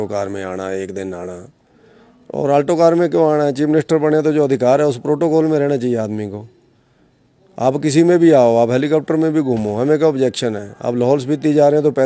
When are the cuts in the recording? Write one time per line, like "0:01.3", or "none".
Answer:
none